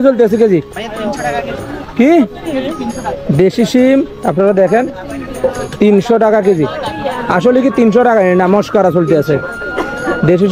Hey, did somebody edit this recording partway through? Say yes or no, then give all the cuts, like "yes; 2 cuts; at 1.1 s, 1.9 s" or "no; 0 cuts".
no; 0 cuts